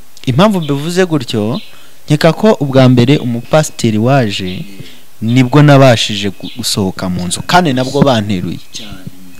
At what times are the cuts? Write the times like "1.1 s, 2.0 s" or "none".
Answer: none